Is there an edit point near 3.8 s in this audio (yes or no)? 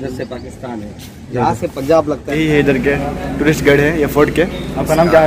no